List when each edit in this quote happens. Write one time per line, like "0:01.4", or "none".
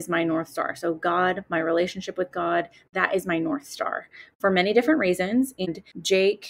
0:05.6